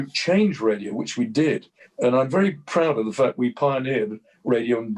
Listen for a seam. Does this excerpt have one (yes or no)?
no